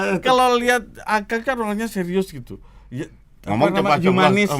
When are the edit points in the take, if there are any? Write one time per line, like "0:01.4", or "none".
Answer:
none

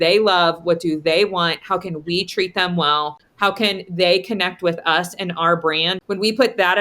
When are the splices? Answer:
0:03.2
0:05.9

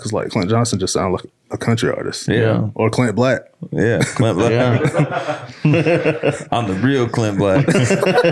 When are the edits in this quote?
0:02.7

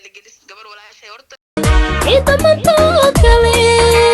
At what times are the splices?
0:01.5

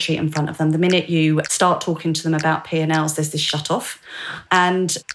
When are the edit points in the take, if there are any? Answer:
none

